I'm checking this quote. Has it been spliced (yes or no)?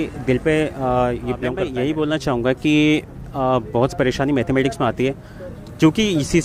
yes